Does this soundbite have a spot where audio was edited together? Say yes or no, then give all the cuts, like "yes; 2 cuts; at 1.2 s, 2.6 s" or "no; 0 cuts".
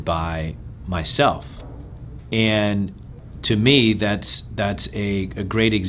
no; 0 cuts